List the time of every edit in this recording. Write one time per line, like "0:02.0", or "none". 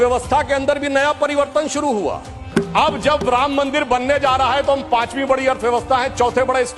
0:02.4